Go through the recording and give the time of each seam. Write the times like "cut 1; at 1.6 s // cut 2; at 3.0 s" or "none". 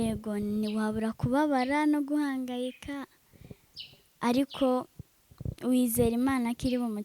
none